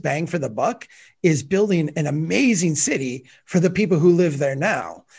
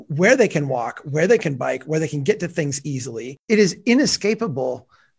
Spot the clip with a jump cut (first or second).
second